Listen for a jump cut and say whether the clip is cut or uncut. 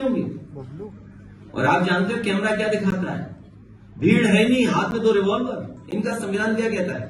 cut